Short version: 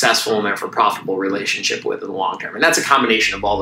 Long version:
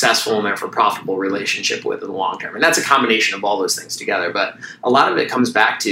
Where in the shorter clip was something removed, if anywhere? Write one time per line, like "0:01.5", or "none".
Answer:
none